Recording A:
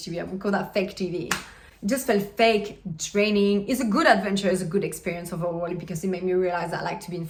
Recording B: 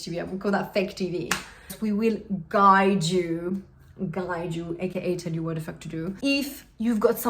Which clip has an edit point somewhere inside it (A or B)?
B